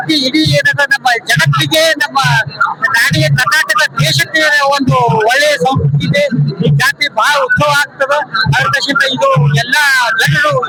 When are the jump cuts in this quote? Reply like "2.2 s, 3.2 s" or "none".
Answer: none